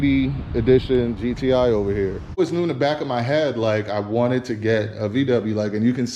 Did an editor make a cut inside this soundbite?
yes; 1 cut; at 2.4 s

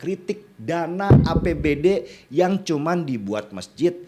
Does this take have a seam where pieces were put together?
no; 0 cuts

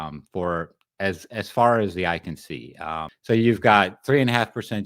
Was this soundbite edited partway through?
yes; 1 cut; at 3.1 s

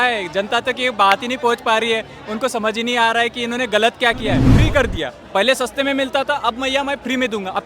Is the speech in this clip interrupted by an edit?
yes; 1 cut; at 4.5 s

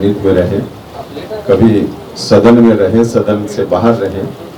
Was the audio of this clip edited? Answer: no; 0 cuts

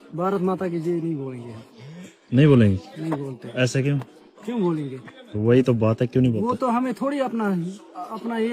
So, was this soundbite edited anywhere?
no; 0 cuts

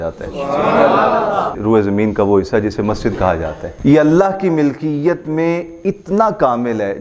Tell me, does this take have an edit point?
yes; 2 cuts; at 1.6 s, 3.6 s

